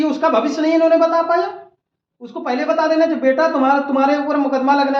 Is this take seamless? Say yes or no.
yes